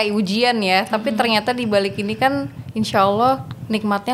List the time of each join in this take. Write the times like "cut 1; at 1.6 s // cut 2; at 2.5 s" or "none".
none